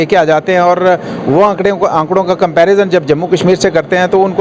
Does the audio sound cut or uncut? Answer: cut